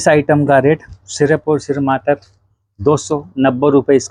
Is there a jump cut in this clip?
no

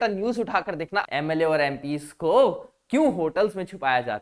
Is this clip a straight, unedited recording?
no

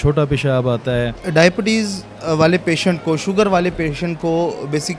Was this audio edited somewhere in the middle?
yes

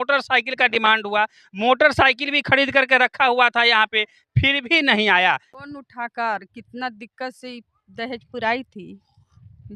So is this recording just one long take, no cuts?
no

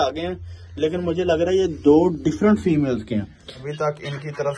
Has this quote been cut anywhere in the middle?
yes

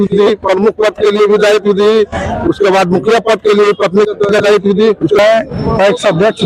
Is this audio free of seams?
no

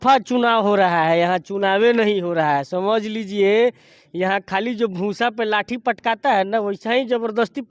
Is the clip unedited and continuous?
yes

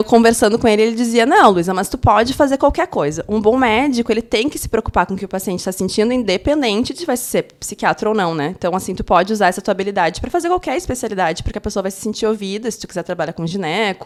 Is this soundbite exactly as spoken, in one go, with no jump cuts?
yes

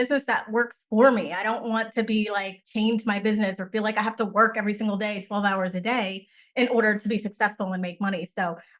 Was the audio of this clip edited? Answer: no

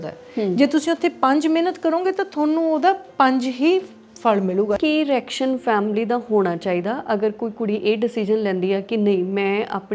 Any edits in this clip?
yes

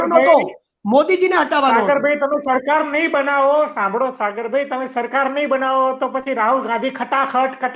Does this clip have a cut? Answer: no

